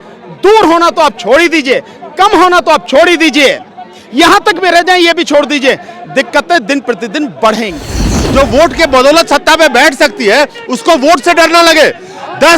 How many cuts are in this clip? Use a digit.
1